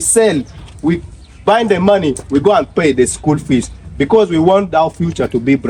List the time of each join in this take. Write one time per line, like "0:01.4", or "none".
none